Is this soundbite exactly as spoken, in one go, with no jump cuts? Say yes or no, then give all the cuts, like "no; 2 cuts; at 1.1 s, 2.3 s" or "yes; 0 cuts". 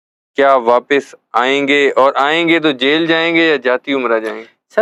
yes; 0 cuts